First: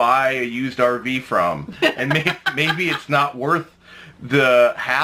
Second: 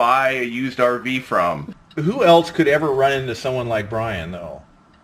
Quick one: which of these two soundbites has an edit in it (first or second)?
second